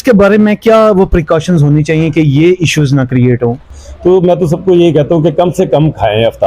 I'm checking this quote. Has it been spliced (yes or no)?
yes